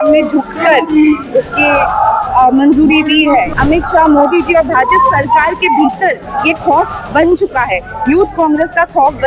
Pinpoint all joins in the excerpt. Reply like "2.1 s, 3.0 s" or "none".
3.5 s